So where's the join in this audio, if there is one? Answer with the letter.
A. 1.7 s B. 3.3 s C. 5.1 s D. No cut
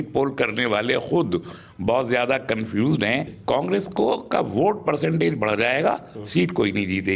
B